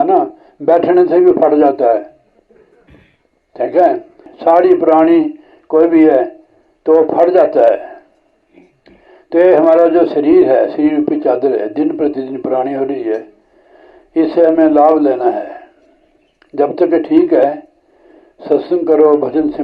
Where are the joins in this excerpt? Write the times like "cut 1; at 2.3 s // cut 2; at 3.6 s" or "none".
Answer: cut 1; at 4.3 s